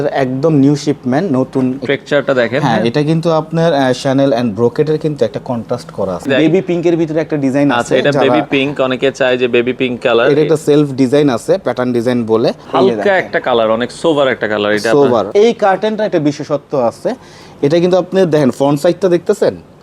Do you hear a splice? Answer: yes; 4 cuts; at 1.8 s, 6.2 s, 12.6 s, 15.3 s

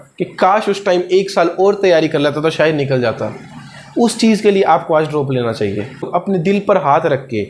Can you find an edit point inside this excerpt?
yes; 1 cut; at 6.1 s

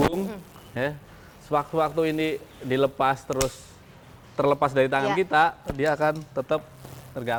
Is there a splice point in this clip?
no; 0 cuts

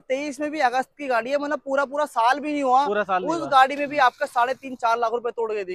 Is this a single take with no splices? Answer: yes; 0 cuts

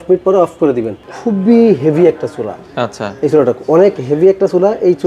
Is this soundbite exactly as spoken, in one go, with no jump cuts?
no; 1 cut; at 1.0 s

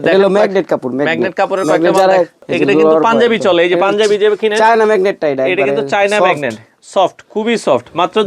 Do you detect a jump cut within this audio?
yes; 1 cut; at 2.5 s

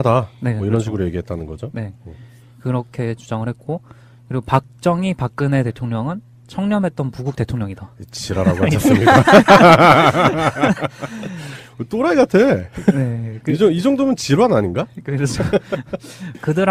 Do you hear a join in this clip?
no; 0 cuts

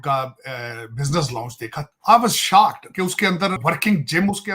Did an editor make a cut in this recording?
yes; 2 cuts; at 1.8 s, 3.6 s

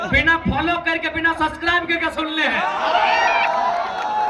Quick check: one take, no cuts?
yes; 0 cuts

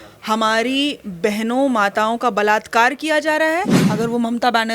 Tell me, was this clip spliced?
yes; 1 cut; at 3.8 s

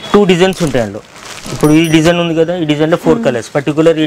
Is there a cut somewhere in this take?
no; 0 cuts

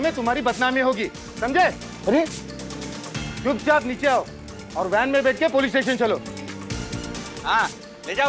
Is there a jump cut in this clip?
no; 0 cuts

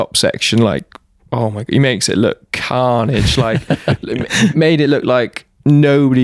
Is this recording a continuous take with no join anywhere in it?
yes; 0 cuts

